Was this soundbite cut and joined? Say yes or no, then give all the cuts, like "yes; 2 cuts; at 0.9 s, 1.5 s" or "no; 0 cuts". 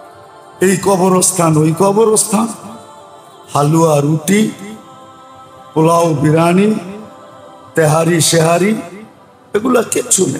no; 0 cuts